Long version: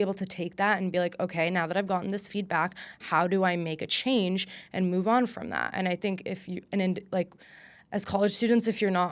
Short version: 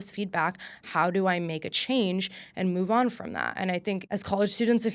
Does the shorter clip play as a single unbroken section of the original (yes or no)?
no